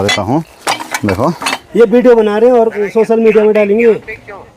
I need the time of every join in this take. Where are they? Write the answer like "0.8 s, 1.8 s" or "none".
1.6 s